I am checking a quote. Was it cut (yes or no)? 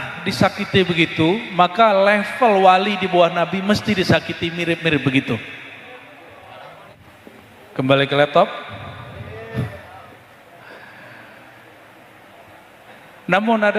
yes